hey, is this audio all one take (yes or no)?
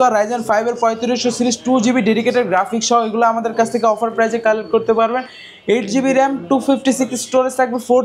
yes